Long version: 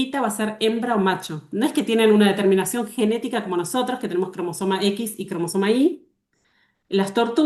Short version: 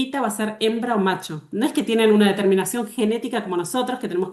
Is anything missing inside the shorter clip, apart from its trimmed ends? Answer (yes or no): no